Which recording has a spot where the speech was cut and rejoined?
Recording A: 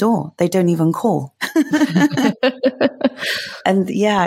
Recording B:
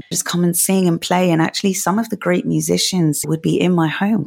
B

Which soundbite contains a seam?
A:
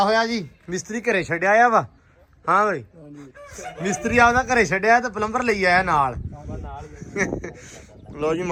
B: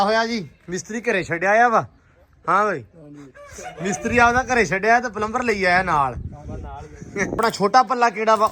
B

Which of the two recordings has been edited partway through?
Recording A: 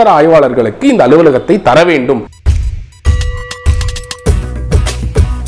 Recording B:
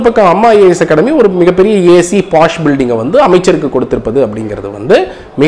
A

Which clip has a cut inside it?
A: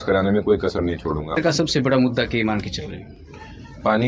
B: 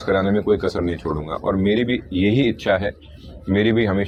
A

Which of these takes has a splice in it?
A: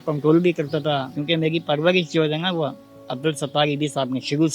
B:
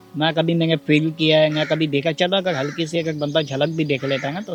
A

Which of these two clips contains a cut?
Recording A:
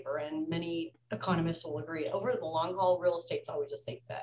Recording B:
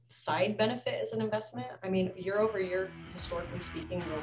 A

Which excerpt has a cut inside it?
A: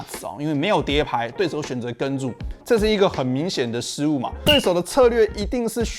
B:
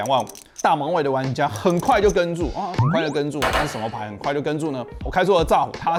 A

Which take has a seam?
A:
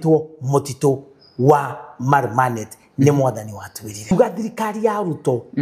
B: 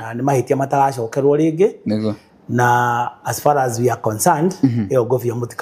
A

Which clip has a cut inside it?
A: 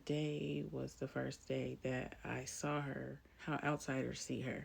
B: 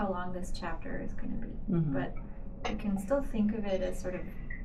A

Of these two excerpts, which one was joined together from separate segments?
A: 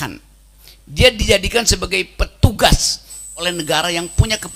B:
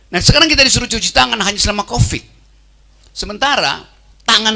A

